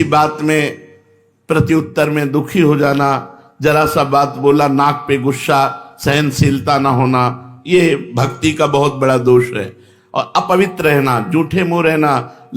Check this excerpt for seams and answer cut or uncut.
uncut